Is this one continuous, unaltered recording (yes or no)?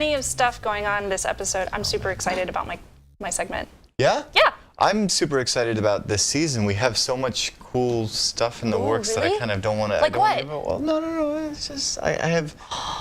no